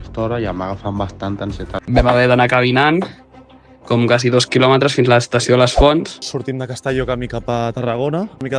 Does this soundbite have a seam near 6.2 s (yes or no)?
yes